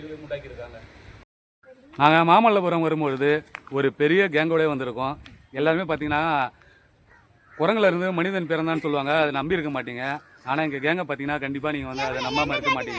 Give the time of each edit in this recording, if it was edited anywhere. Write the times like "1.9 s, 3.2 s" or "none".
1.0 s